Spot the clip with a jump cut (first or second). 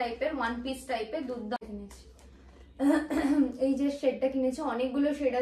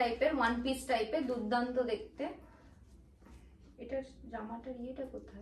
first